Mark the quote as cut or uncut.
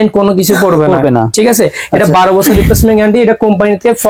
uncut